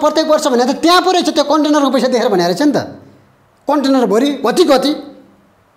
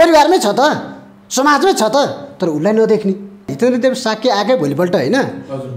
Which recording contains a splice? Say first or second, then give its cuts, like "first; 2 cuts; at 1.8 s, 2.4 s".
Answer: second; 1 cut; at 3.5 s